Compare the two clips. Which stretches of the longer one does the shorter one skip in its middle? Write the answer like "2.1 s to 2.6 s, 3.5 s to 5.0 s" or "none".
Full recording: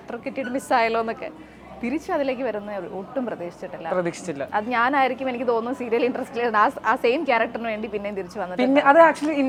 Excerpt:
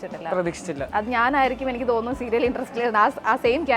none